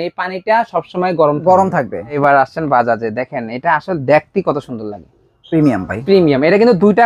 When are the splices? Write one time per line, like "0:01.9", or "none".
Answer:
0:02.2